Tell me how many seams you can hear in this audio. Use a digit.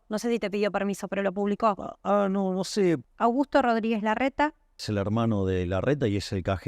2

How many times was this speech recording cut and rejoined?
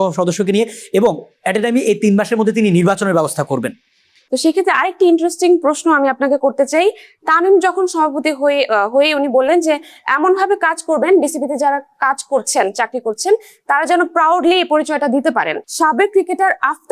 2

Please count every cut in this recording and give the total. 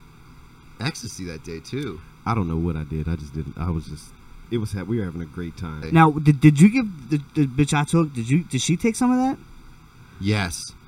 1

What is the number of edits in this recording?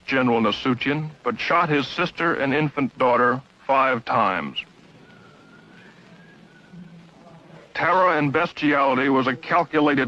1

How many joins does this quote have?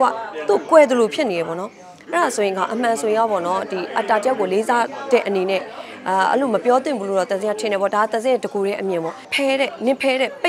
1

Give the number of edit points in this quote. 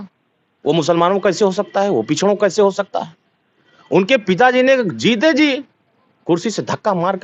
0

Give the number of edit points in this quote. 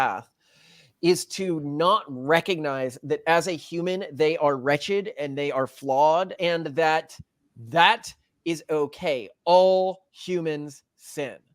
1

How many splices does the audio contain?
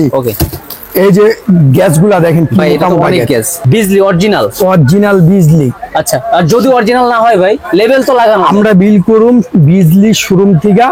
1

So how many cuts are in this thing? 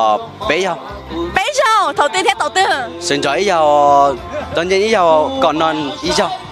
1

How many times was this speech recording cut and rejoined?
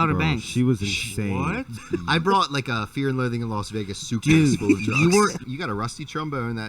2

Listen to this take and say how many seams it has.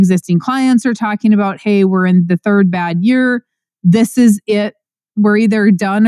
0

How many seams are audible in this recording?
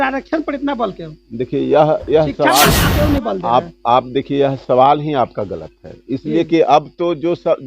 1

